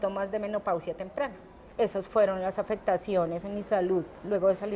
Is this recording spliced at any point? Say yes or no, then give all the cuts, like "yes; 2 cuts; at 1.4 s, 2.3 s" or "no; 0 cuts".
yes; 1 cut; at 1.6 s